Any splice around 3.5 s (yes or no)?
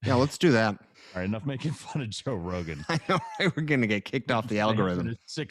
no